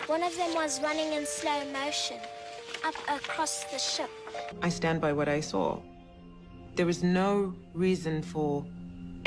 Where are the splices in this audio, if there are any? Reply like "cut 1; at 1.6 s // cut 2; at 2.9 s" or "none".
cut 1; at 4.5 s